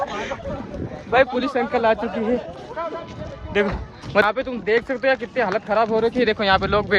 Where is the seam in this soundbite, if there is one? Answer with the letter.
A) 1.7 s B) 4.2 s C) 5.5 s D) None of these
B